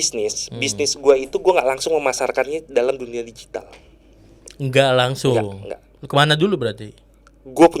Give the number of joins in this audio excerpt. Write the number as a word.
zero